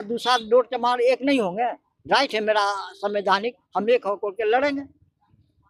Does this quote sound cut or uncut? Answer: uncut